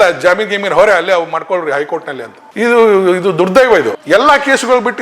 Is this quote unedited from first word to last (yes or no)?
no